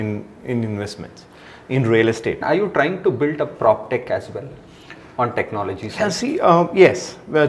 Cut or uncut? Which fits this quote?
cut